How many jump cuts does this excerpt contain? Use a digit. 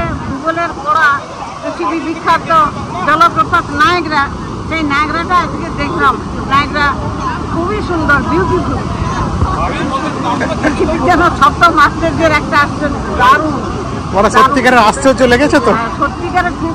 0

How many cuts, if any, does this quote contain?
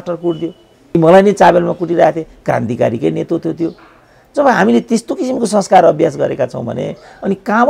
1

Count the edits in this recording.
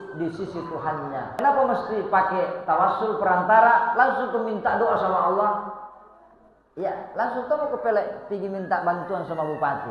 1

